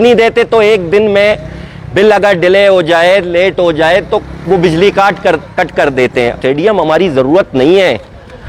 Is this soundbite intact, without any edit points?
no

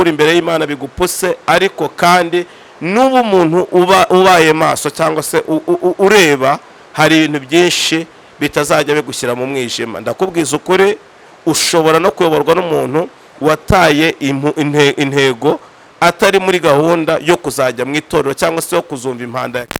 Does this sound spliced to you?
no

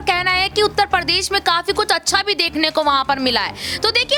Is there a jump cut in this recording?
no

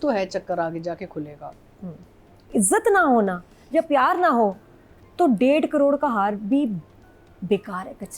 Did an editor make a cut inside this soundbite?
yes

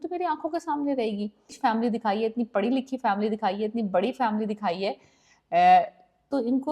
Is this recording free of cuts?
no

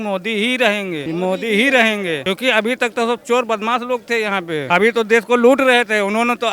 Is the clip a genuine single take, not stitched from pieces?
no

